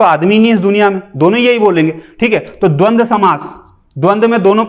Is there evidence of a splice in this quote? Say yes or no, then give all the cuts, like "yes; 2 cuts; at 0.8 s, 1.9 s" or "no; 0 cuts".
no; 0 cuts